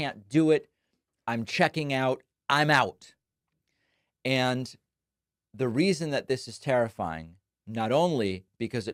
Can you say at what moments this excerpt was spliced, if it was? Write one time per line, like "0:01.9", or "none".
none